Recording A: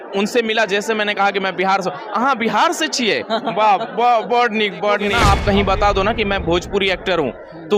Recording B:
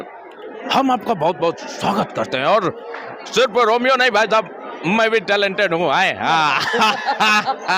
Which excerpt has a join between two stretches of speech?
A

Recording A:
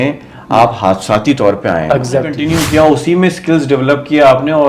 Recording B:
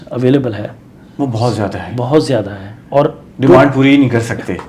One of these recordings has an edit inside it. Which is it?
A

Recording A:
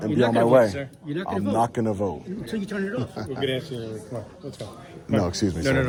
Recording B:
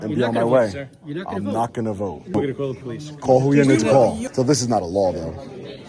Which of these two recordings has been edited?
B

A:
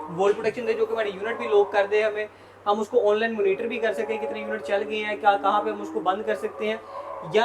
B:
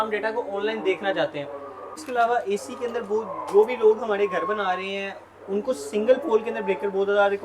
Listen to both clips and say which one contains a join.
B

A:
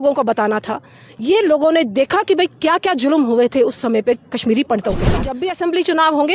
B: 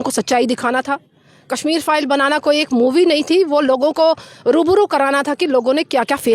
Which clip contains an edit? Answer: A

